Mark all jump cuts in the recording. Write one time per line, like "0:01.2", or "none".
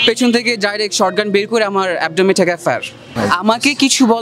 0:03.1

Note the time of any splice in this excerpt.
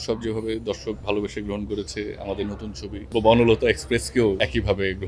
0:03.1
0:04.4

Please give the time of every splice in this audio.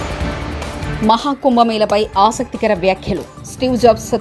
0:00.9

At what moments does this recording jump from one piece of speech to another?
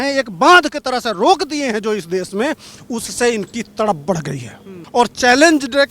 0:04.8

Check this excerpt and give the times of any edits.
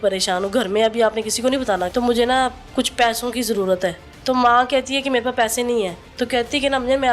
0:01.9
0:04.1
0:06.0

